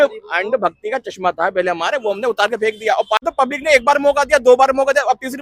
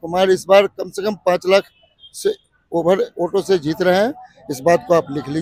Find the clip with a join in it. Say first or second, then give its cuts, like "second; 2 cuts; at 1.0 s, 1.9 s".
first; 1 cut; at 3.2 s